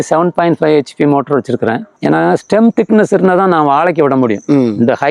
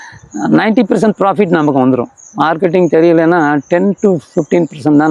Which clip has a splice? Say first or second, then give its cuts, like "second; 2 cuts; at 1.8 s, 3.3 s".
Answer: first; 1 cut; at 1.9 s